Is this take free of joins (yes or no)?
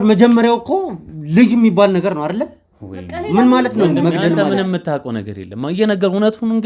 yes